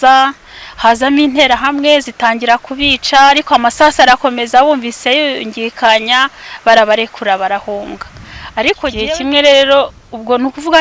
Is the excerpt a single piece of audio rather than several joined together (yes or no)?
no